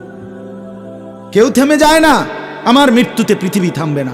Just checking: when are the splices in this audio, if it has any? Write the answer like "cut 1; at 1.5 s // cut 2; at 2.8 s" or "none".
cut 1; at 1.1 s